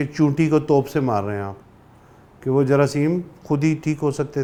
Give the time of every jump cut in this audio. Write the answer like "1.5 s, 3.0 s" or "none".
none